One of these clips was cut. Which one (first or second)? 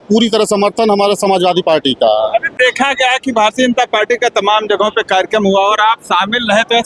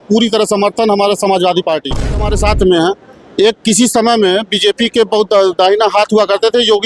second